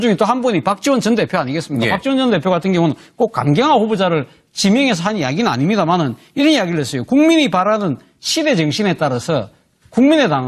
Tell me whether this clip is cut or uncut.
cut